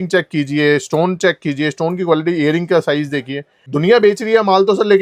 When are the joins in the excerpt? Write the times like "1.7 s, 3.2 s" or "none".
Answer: 3.6 s